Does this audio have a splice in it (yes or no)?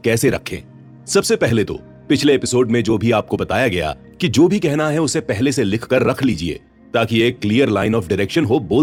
no